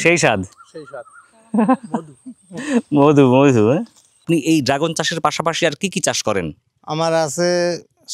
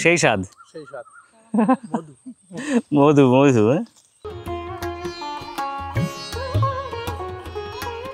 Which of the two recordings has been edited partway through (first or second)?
first